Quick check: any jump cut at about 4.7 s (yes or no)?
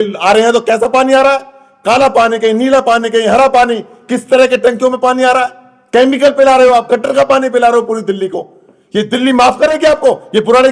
no